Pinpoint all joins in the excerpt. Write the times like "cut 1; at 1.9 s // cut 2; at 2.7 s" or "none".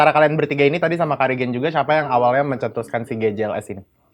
none